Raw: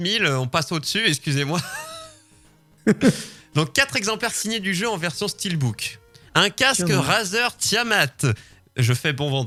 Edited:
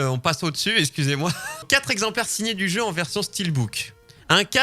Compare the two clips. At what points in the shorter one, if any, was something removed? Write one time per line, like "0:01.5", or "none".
0:01.7